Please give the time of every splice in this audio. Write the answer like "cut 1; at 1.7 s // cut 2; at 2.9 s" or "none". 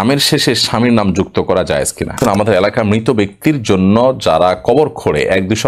cut 1; at 2.2 s